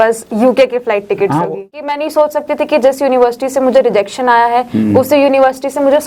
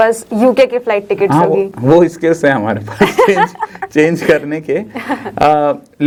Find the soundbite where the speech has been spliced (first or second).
first